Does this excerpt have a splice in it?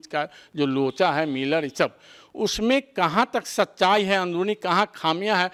no; 0 cuts

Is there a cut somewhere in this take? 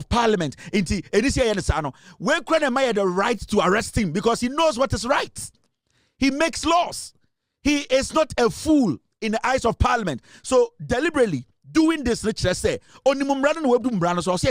no; 0 cuts

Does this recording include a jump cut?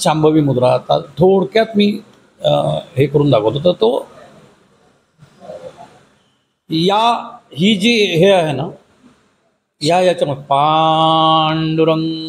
no; 0 cuts

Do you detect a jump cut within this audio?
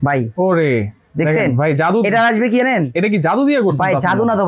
no; 0 cuts

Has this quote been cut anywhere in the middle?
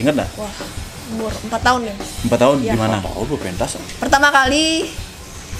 no; 0 cuts

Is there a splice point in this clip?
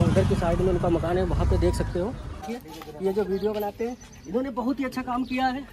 yes; 1 cut; at 2.5 s

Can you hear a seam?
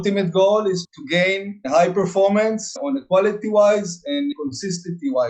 yes; 2 cuts; at 2.7 s, 4.3 s

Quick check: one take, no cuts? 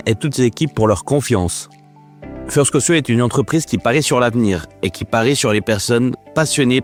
yes; 0 cuts

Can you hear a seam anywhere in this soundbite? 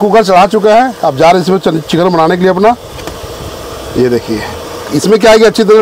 no; 0 cuts

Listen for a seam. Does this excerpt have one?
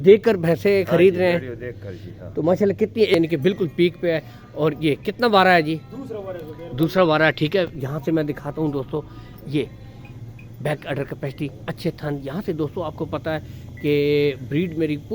yes; 1 cut; at 3.1 s

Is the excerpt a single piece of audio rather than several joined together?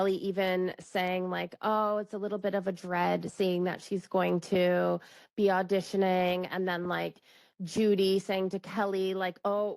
yes; 0 cuts

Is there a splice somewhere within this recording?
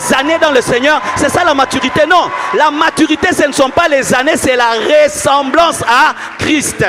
no; 0 cuts

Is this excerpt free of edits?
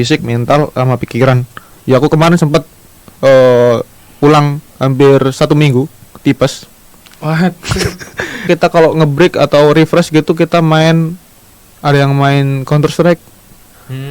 no; 1 cut; at 8.4 s

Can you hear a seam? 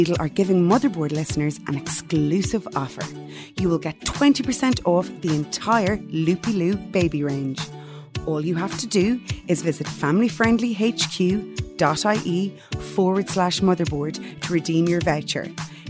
no; 0 cuts

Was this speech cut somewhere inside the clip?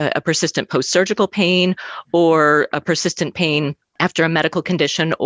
yes; 1 cut; at 3.8 s

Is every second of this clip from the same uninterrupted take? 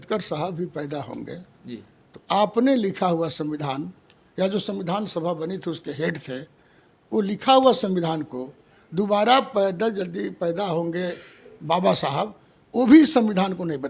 yes; 0 cuts

